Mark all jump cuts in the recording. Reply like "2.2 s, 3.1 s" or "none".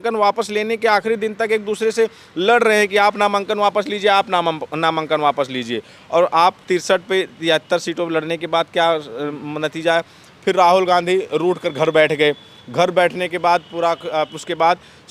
none